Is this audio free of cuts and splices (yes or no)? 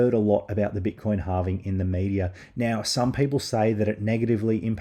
yes